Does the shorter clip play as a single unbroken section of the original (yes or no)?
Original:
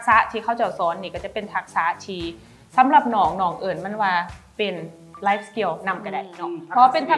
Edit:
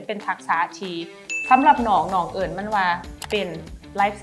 yes